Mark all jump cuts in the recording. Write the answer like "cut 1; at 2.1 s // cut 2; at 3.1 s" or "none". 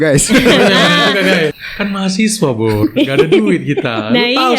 cut 1; at 1.5 s